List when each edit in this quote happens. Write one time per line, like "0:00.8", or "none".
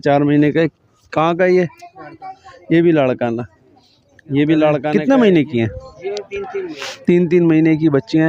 0:04.9